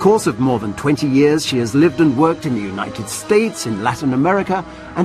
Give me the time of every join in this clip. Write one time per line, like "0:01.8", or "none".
none